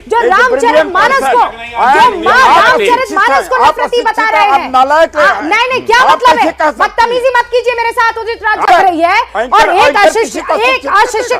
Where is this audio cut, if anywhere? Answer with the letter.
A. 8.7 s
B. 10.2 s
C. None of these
A